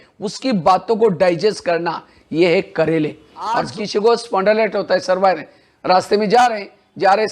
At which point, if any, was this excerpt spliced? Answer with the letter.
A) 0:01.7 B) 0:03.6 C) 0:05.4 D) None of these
B